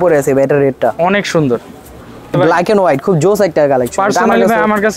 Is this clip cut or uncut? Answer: cut